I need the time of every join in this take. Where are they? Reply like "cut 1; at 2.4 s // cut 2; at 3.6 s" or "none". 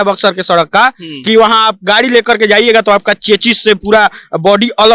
none